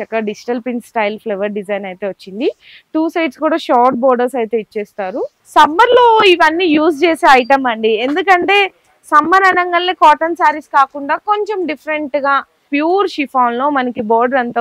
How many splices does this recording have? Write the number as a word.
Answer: two